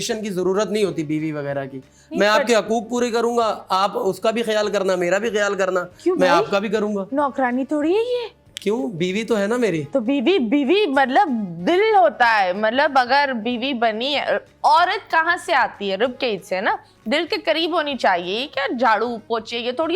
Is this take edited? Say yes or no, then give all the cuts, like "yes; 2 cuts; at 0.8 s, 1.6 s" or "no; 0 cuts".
no; 0 cuts